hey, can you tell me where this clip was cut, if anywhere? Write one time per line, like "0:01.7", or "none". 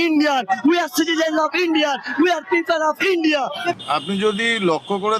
0:03.7